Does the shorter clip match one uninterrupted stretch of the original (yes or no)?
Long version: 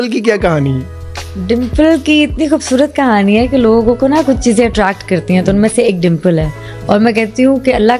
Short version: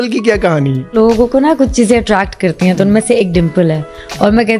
no